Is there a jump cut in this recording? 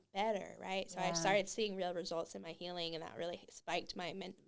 no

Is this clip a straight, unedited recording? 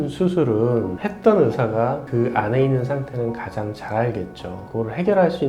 no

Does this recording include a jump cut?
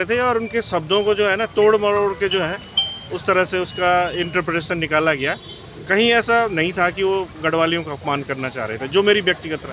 no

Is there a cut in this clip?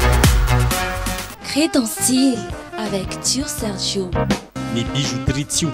no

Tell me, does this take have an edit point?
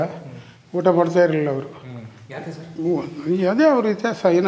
no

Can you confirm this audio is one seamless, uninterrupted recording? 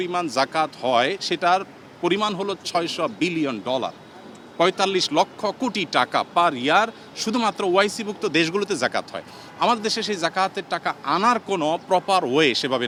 yes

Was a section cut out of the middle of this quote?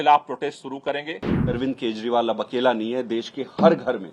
yes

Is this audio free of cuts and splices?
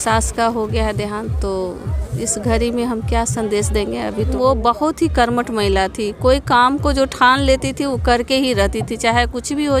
no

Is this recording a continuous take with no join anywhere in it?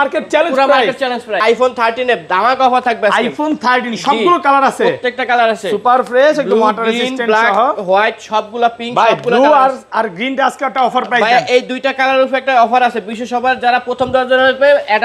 no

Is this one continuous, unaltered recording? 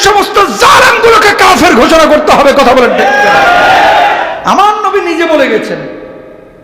no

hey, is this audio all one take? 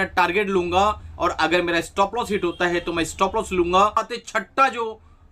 no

